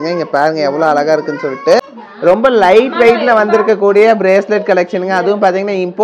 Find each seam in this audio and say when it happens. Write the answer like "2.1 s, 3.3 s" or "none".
none